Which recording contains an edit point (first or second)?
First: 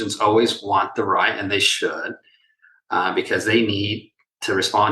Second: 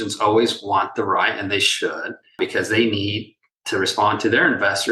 second